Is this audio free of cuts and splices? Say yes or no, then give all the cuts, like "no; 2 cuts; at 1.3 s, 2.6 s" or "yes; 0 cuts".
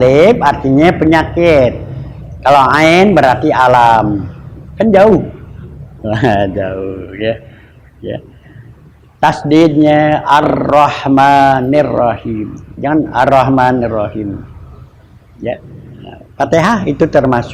yes; 0 cuts